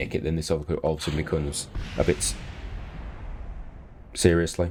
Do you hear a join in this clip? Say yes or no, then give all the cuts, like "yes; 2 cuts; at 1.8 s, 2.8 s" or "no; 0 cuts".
no; 0 cuts